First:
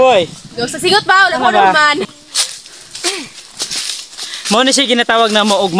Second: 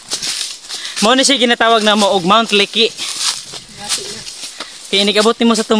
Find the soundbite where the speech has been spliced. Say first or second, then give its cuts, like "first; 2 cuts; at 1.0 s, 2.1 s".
first; 1 cut; at 2.1 s